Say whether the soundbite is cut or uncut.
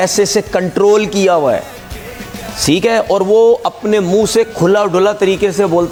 uncut